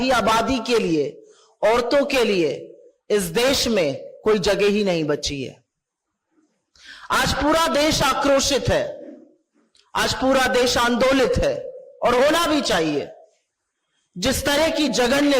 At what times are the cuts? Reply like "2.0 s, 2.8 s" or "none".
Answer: none